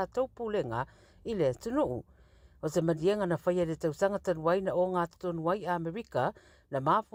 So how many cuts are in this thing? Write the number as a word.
zero